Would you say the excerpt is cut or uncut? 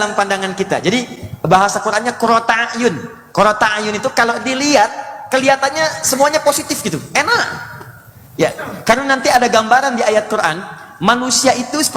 uncut